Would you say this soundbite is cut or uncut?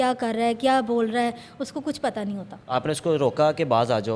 uncut